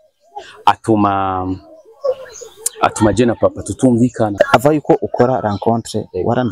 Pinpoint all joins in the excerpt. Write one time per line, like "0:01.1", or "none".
0:04.3